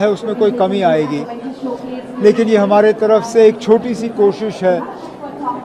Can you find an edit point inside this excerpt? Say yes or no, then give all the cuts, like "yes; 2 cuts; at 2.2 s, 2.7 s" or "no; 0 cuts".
no; 0 cuts